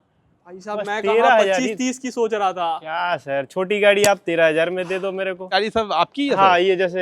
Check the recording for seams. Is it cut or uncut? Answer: cut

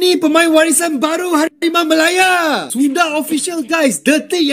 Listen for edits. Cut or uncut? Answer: uncut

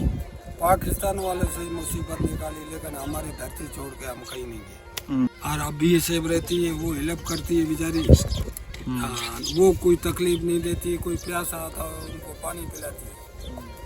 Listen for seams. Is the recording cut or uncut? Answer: cut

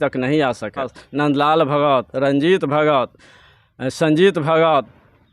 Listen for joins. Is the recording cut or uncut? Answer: cut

